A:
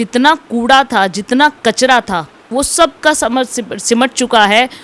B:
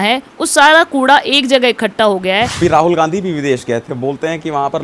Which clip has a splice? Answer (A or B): B